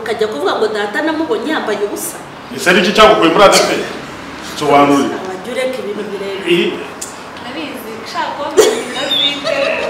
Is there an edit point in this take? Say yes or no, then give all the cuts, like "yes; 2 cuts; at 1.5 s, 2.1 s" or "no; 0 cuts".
yes; 1 cut; at 2.4 s